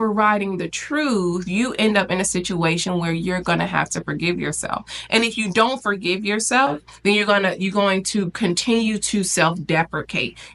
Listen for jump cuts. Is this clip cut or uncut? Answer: uncut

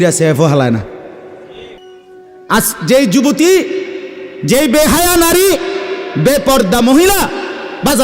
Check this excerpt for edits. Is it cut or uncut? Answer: cut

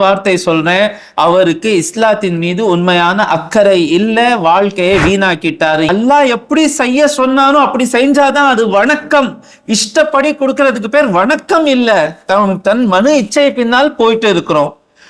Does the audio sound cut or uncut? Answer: cut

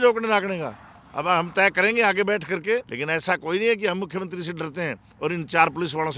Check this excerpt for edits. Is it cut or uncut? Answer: cut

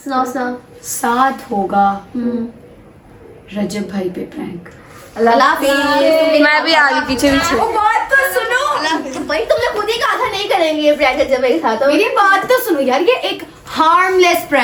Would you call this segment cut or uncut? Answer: uncut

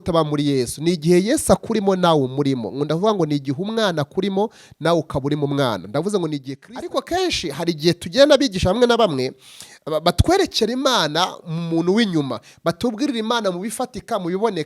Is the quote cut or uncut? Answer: cut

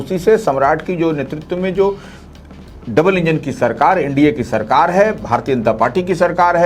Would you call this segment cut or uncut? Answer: uncut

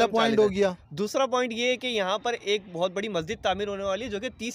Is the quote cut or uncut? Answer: uncut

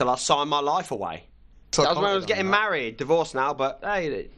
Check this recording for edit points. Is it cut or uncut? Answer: cut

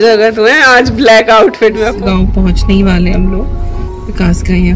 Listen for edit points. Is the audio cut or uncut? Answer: cut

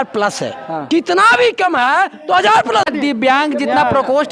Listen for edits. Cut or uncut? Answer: cut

